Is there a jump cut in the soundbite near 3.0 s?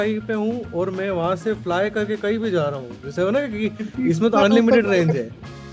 no; 0 cuts

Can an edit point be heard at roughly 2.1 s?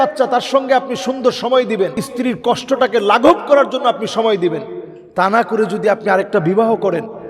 yes; 1 cut; at 2.1 s

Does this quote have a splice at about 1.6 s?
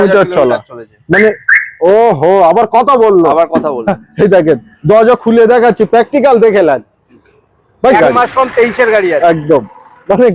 no; 1 cut; at 7.9 s

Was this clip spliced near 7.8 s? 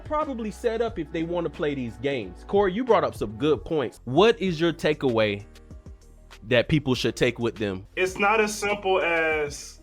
yes; 2 cuts; at 4.0 s, 7.8 s

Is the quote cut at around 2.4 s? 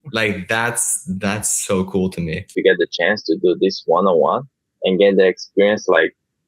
yes; 1 cut; at 2.4 s

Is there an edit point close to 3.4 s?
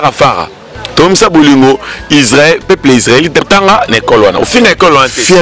yes; 1 cut; at 3.4 s

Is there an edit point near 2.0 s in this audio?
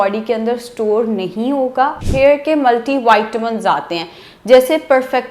yes; 1 cut; at 2.0 s

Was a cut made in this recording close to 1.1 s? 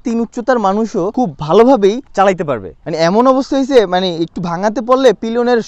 yes; 2 cuts; at 1.1 s, 2.8 s

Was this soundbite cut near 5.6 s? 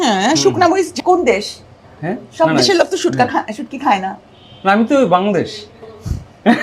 no; 1 cut; at 0.9 s

